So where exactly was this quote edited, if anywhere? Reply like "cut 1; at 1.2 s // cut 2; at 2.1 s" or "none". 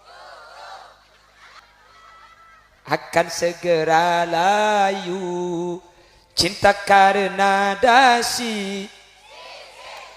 cut 1; at 1.6 s

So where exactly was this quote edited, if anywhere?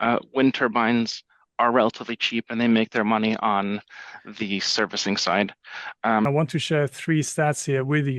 cut 1; at 6.3 s

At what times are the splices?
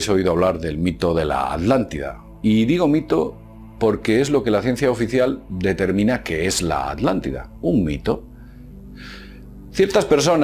cut 1; at 4.3 s

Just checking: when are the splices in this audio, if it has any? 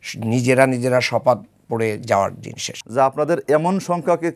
cut 1; at 2.8 s

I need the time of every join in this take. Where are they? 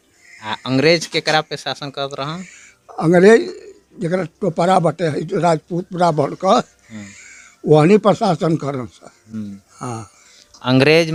none

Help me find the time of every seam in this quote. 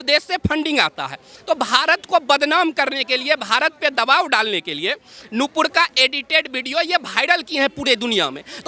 none

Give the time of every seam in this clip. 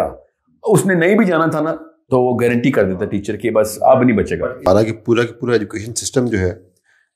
cut 1; at 4.7 s

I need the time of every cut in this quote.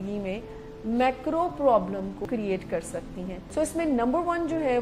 cut 1; at 2.3 s

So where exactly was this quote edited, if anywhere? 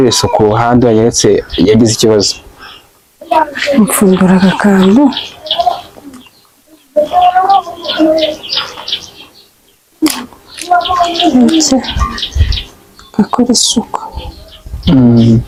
none

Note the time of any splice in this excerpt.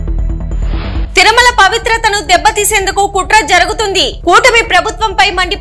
cut 1; at 1.0 s

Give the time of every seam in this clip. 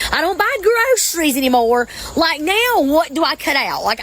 cut 1; at 2.3 s

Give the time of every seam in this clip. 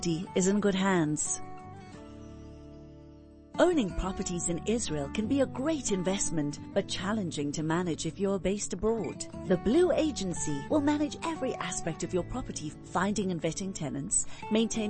cut 1; at 1.2 s // cut 2; at 3.4 s

